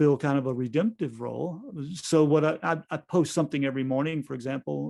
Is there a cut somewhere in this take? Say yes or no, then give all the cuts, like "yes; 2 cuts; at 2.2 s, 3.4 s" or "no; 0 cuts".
no; 0 cuts